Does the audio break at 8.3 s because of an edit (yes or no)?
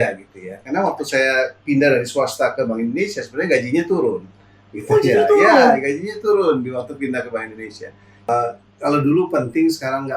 yes